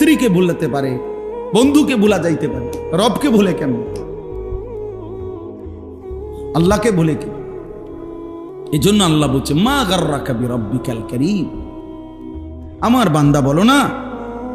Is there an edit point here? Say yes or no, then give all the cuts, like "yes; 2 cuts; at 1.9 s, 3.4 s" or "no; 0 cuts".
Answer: yes; 2 cuts; at 7.2 s, 8.7 s